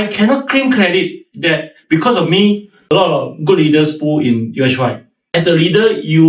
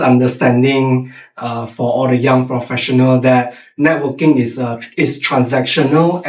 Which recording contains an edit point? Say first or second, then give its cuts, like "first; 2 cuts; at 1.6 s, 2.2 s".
first; 2 cuts; at 2.7 s, 5.1 s